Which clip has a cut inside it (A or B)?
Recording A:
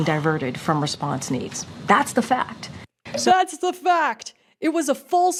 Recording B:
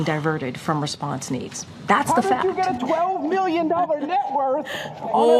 B